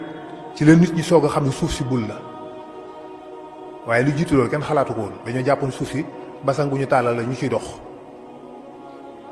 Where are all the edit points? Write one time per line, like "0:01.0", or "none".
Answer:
none